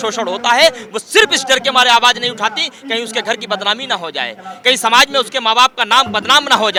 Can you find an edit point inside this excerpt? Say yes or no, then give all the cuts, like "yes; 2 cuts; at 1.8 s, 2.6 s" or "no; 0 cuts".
no; 0 cuts